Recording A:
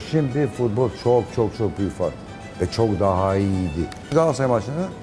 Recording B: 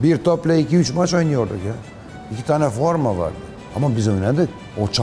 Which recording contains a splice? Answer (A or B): A